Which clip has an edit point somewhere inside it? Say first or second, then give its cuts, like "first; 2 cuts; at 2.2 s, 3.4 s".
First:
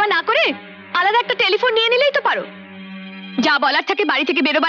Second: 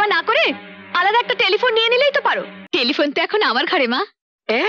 second; 1 cut; at 2.5 s